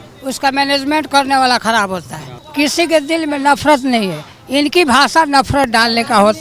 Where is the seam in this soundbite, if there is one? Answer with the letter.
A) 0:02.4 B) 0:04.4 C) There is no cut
A